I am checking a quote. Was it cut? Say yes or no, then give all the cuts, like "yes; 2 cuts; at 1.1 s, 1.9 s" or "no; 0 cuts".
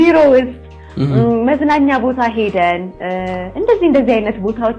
no; 0 cuts